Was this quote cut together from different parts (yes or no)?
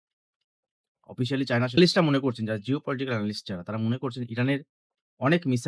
yes